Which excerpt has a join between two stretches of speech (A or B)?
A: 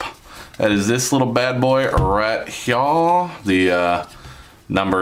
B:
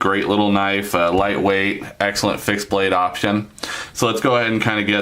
B